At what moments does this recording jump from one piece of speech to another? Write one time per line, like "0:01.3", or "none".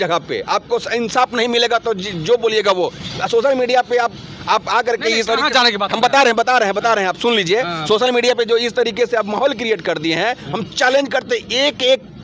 none